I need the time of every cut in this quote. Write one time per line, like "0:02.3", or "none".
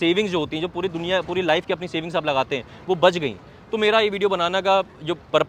none